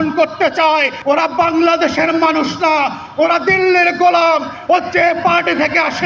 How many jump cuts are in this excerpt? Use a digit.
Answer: 1